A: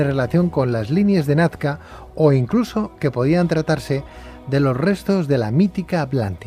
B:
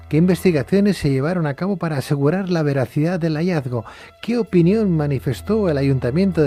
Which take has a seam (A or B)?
A